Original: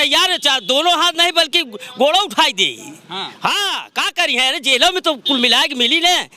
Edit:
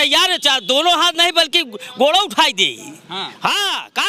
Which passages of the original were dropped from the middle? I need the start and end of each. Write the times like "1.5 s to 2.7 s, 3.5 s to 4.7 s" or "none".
none